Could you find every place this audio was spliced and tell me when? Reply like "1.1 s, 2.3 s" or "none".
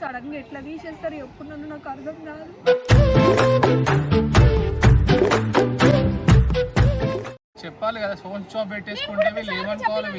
none